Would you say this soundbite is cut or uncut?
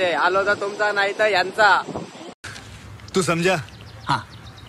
uncut